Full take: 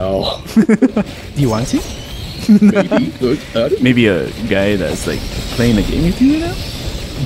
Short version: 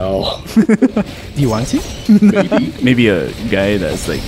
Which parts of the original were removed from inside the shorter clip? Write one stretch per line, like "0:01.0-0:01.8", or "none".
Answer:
0:01.9-0:02.3
0:03.2-0:03.8

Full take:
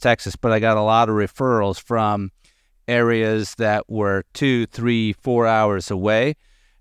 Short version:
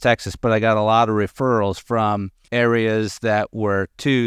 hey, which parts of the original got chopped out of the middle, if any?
0:02.3-0:02.7

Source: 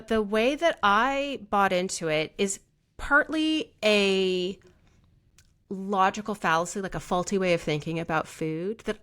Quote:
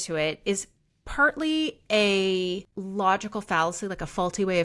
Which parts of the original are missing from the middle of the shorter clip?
0:04.7-0:05.7

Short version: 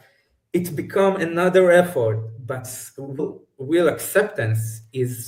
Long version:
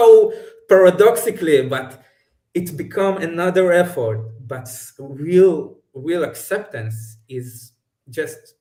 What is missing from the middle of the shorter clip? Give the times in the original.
0:05.2-0:05.6

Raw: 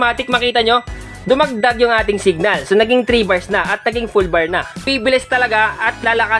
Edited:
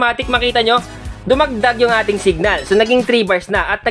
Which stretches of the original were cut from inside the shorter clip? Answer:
none

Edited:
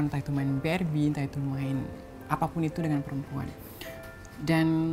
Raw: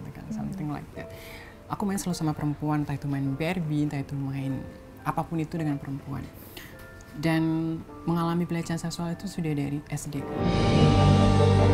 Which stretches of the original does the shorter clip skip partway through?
none

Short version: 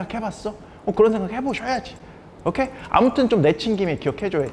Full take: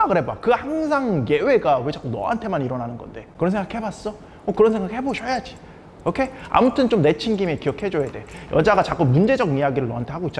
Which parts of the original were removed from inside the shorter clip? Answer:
none

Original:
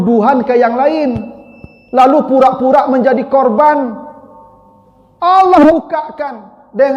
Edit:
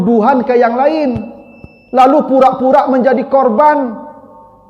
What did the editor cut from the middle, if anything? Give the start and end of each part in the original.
none

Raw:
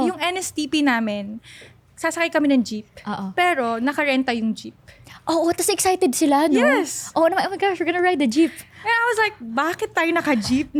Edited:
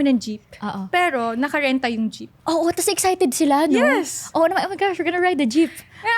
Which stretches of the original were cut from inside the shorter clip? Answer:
0:04.7-0:05.1

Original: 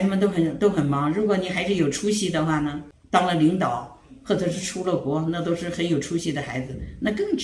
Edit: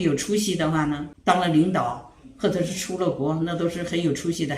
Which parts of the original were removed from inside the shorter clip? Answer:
0:02.8-0:03.0

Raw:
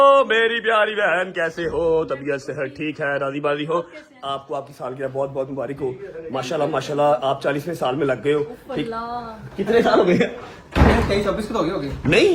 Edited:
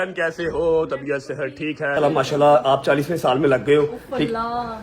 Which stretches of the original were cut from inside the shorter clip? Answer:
0:03.1-0:06.5

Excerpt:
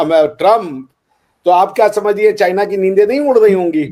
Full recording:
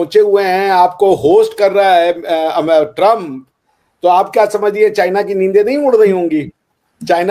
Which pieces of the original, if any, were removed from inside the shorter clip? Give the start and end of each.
none

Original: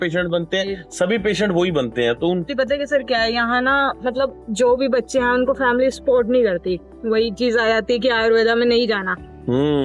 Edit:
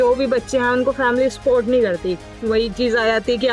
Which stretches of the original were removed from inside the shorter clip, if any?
none

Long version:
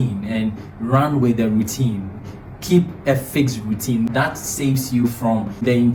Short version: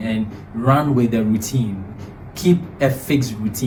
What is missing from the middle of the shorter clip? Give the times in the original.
none

